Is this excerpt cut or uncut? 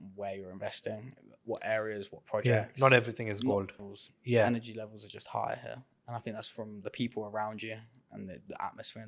cut